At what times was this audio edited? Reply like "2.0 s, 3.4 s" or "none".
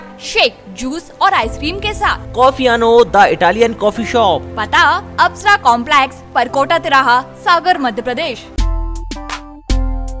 8.5 s